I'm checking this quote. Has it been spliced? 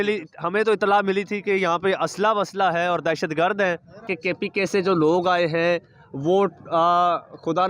yes; 1 cut; at 4.1 s

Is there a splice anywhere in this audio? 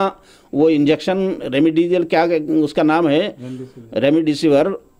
no; 0 cuts

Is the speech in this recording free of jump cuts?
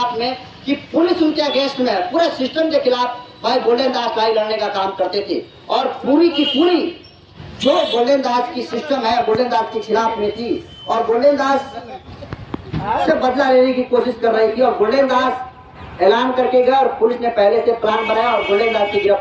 yes; 0 cuts

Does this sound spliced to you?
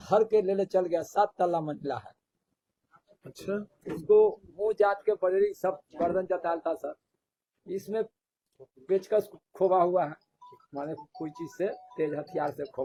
no; 0 cuts

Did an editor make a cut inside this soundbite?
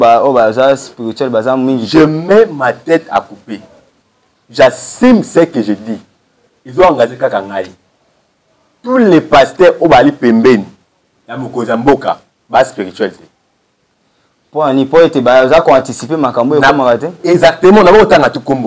no; 0 cuts

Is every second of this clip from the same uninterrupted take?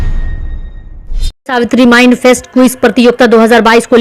no; 1 cut; at 1.3 s

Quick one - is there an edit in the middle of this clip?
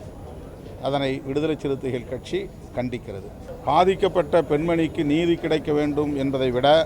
yes; 1 cut; at 3.5 s

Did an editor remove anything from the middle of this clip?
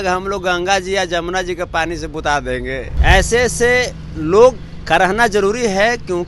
yes; 1 cut; at 2.9 s

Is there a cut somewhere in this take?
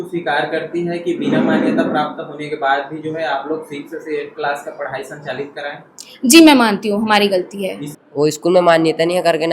yes; 1 cut; at 7.8 s

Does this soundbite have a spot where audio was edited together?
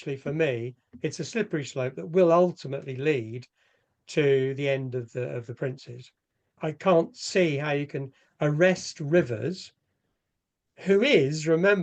yes; 1 cut; at 6.6 s

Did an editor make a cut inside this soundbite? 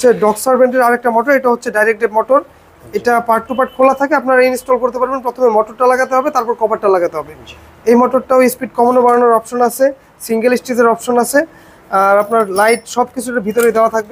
no; 0 cuts

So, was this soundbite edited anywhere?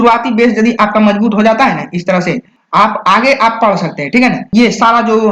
yes; 2 cuts; at 2.5 s, 4.5 s

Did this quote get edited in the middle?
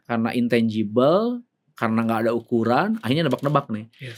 no; 0 cuts

